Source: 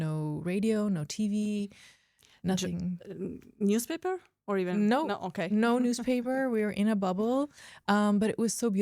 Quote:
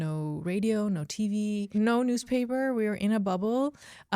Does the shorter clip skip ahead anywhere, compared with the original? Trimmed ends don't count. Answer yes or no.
yes